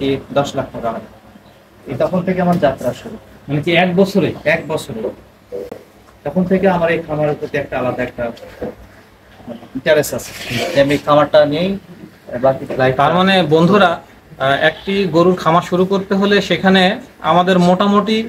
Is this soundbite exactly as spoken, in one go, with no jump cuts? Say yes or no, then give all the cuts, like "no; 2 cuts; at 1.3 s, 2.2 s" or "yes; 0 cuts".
yes; 0 cuts